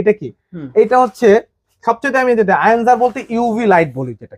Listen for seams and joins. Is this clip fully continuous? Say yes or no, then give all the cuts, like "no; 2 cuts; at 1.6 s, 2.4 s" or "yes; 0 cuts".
yes; 0 cuts